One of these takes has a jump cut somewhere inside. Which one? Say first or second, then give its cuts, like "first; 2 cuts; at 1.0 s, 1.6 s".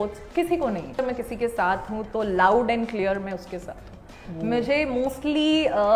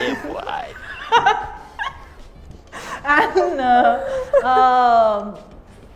first; 1 cut; at 1.0 s